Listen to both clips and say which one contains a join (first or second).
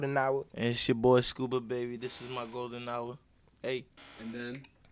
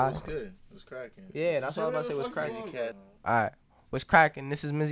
second